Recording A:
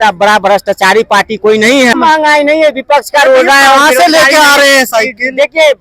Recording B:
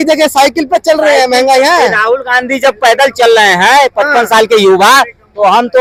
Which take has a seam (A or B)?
A